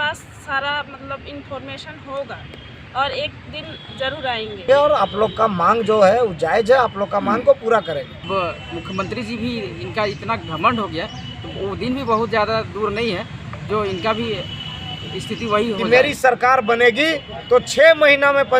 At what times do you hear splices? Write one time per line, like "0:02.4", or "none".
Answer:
0:04.7
0:08.3
0:15.8